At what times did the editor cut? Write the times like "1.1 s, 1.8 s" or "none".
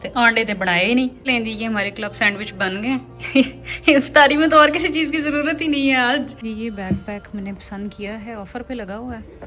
1.2 s, 6.4 s